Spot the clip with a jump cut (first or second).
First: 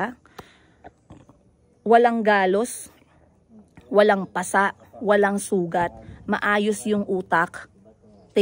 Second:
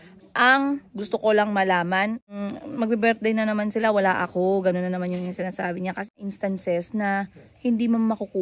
second